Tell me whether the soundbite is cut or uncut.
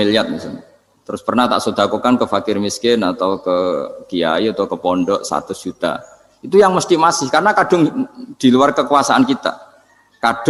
uncut